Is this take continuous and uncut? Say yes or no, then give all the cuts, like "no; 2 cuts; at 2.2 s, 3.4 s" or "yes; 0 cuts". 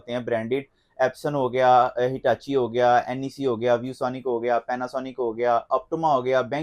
yes; 0 cuts